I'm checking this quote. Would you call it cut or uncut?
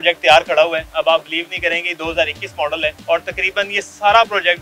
cut